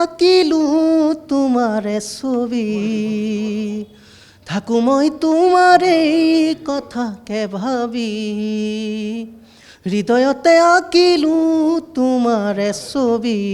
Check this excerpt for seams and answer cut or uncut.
uncut